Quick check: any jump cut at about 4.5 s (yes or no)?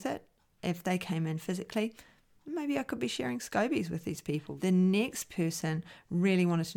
yes